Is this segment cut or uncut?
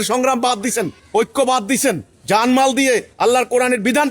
cut